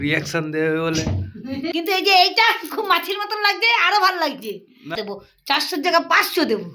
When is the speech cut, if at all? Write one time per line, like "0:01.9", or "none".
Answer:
0:01.7
0:04.9